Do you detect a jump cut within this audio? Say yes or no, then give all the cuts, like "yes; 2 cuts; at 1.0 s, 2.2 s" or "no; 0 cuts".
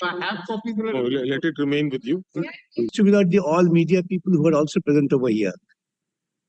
yes; 1 cut; at 2.9 s